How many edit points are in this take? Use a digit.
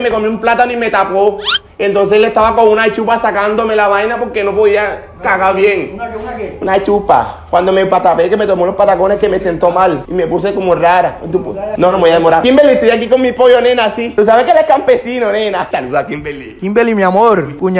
0